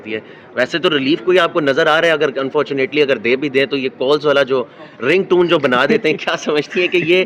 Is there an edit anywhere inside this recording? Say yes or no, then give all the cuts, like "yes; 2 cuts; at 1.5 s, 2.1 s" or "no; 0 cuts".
no; 0 cuts